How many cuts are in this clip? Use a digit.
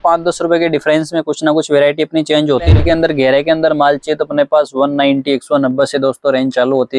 1